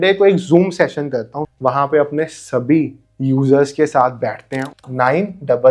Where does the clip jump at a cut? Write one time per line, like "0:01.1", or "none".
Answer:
0:01.5
0:04.7